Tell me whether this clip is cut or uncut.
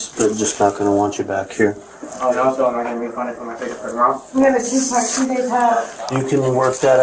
uncut